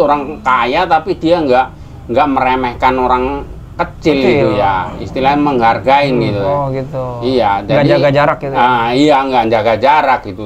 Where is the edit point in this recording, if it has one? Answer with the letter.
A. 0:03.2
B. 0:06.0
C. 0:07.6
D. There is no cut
D